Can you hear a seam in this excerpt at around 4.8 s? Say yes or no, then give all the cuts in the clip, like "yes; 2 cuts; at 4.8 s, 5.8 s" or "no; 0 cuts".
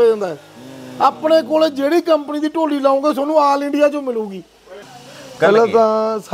yes; 1 cut; at 4.8 s